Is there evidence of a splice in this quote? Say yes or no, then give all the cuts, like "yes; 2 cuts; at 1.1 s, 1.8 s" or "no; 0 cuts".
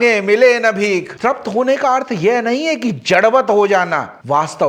yes; 1 cut; at 1.1 s